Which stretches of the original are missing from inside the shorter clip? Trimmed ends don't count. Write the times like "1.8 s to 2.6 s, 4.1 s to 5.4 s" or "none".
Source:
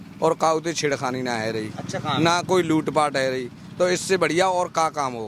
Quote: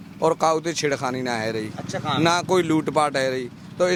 none

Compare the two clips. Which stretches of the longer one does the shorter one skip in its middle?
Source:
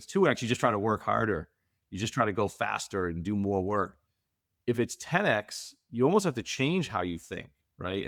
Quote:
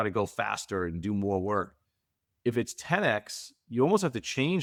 none

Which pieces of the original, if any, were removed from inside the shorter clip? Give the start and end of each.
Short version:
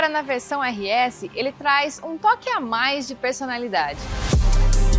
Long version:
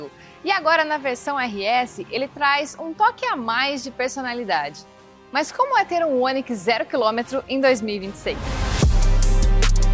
4.8 s to 8.6 s

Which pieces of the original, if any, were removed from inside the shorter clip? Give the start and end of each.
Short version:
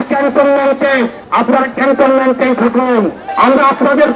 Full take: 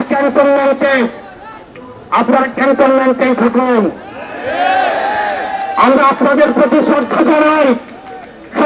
1.2 s to 2.0 s, 4.0 s to 5.6 s

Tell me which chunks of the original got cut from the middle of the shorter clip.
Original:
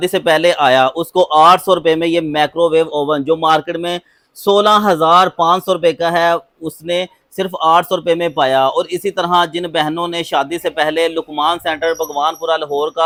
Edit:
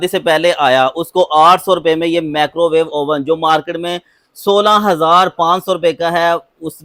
none

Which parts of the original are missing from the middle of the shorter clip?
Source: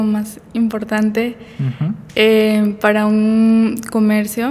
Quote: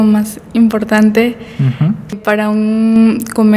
2.1 s to 2.7 s

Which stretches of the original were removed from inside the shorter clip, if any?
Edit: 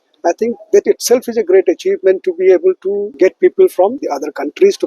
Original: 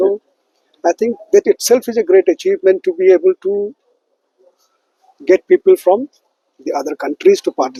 3.7 s to 5.2 s, 6.1 s to 6.6 s

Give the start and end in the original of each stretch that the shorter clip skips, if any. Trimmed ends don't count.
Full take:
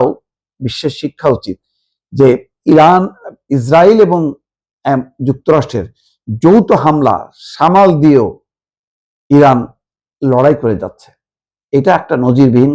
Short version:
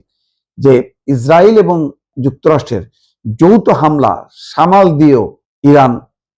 2.5 s to 3.4 s, 4.5 s to 5.1 s, 8.4 s to 9.1 s

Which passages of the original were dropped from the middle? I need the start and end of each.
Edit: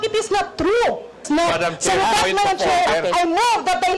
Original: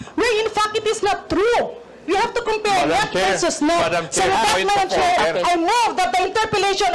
2.0 s to 3.5 s

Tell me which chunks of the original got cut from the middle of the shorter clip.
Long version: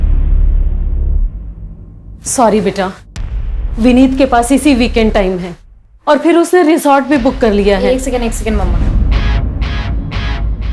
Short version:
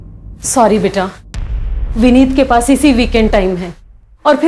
none

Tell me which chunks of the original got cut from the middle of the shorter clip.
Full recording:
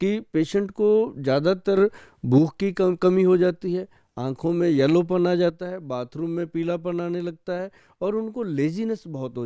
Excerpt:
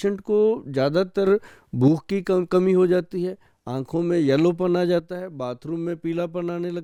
none

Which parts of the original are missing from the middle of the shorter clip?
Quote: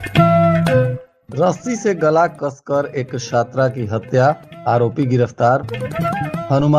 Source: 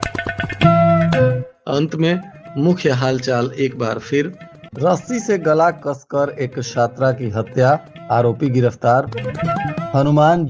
1.5 s to 4.5 s

